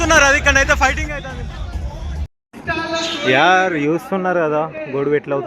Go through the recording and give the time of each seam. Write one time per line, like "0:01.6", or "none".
0:02.3

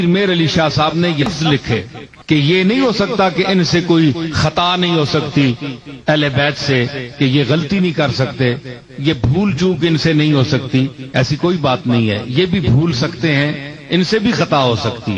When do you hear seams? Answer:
0:01.3

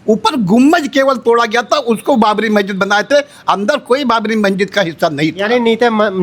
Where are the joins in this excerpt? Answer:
none

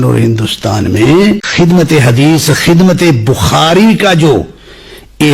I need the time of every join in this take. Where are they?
0:01.5

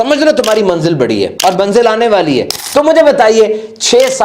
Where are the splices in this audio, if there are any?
0:01.3
0:02.6

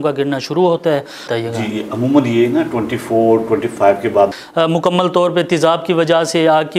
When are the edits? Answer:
0:01.2
0:04.3

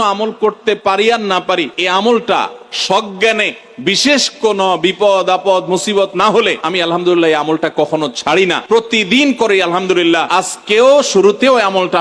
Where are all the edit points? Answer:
0:01.8
0:06.6
0:08.6
0:10.2

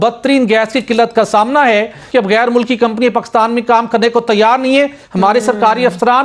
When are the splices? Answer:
0:02.0

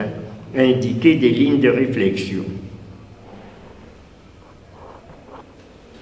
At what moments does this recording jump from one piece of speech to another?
none

